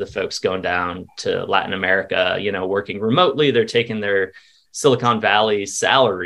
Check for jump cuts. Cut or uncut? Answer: uncut